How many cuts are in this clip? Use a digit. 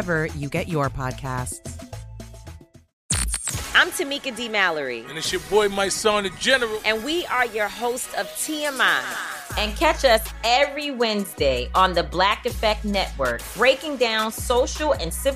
1